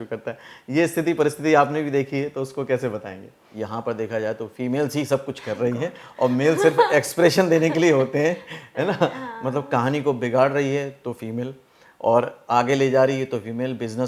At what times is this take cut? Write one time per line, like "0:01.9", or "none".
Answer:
0:03.5